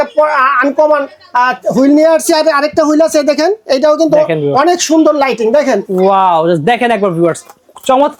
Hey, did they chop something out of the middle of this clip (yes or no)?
no